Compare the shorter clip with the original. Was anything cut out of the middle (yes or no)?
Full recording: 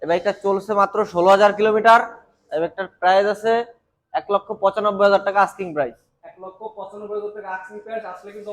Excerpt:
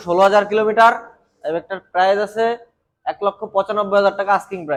no